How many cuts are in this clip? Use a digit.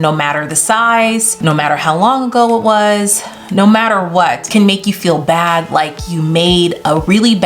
2